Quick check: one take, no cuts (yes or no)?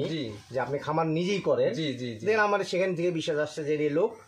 yes